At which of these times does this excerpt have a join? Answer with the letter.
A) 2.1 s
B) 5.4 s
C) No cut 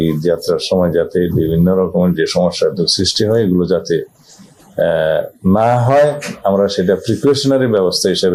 C